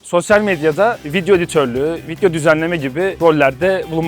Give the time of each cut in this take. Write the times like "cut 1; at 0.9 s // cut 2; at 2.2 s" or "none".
cut 1; at 3.1 s